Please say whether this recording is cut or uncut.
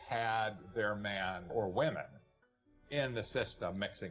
cut